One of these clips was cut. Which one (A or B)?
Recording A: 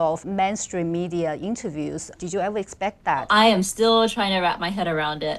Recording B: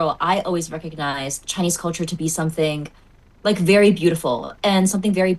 A